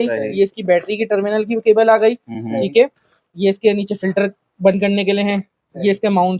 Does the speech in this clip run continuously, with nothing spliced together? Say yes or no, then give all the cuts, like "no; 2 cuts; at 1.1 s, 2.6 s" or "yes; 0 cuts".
yes; 0 cuts